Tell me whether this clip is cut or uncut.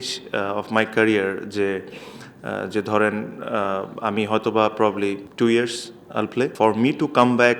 cut